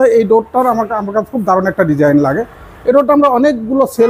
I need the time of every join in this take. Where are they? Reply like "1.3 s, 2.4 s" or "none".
none